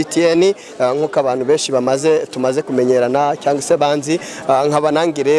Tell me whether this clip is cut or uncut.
uncut